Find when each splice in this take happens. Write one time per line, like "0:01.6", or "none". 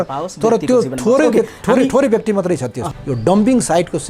0:02.8